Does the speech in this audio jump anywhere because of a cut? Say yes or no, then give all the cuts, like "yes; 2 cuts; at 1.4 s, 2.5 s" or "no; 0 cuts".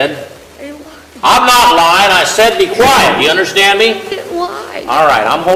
no; 0 cuts